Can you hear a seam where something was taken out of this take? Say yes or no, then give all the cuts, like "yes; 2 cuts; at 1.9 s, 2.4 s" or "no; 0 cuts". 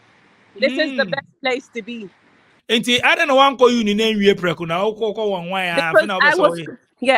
yes; 1 cut; at 2.6 s